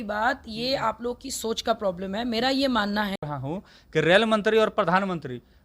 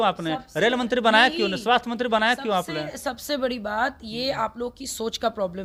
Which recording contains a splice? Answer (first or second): first